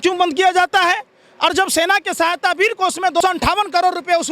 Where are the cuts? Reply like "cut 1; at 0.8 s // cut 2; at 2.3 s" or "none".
cut 1; at 3.2 s